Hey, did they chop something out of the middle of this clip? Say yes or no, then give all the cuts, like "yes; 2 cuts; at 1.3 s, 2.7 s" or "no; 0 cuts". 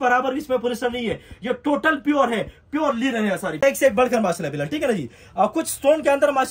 yes; 1 cut; at 3.6 s